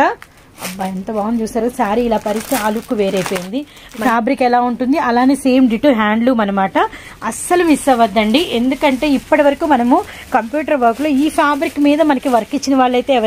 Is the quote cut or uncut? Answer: cut